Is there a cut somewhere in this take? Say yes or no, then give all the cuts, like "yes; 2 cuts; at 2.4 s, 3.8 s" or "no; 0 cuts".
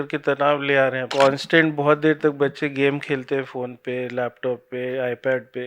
yes; 1 cut; at 1.1 s